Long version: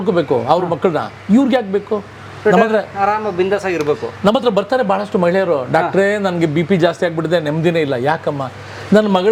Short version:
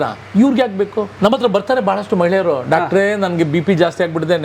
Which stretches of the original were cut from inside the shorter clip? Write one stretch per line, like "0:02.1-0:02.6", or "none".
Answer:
0:02.1-0:04.1